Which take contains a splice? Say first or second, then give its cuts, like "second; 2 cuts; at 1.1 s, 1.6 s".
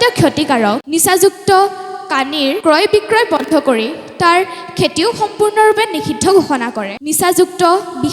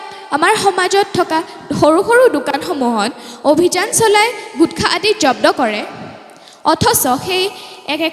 first; 3 cuts; at 0.8 s, 2.6 s, 6.9 s